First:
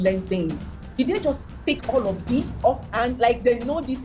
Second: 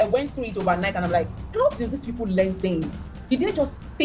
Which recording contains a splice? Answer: second; 1 cut; at 1.4 s

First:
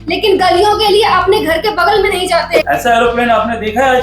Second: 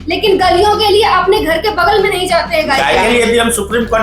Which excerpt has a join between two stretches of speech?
first; 1 cut; at 2.6 s

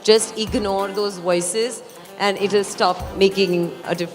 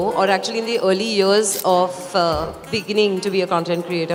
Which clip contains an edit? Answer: first; 1 cut; at 3.1 s

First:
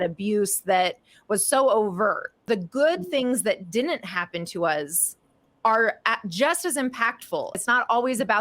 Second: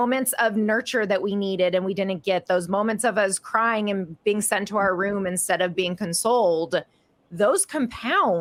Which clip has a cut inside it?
first; 2 cuts; at 2.5 s, 7.6 s

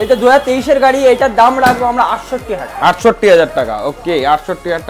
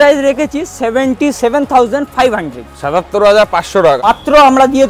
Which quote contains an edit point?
second; 1 cut; at 4.0 s

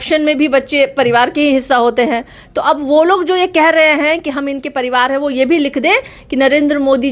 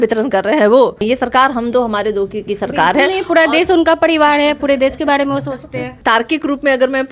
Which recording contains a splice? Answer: second; 2 cuts; at 1.0 s, 5.9 s

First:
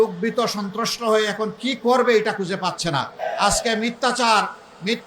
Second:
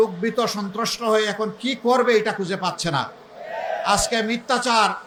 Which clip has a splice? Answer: first; 1 cut; at 3.1 s

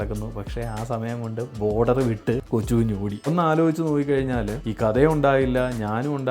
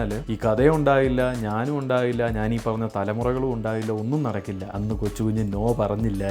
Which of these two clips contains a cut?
first; 1 cut; at 3.3 s

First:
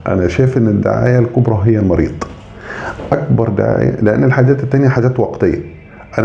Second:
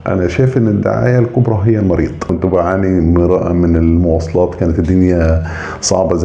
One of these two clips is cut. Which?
second; 1 cut; at 2.3 s

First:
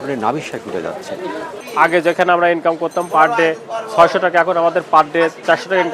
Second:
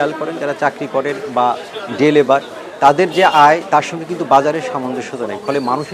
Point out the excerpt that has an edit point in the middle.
first; 1 cut; at 1.5 s

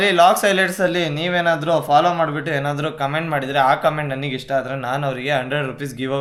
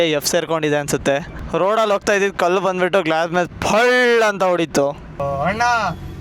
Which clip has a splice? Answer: second; 2 cuts; at 1.3 s, 5.2 s

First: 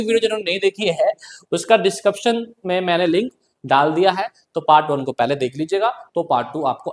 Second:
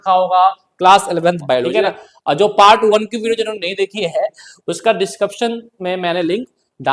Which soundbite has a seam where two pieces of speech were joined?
second; 1 cut; at 1.8 s

